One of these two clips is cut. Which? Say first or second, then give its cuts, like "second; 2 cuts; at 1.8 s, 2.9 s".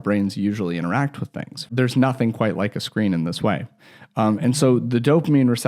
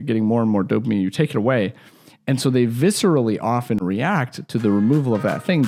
first; 1 cut; at 1.7 s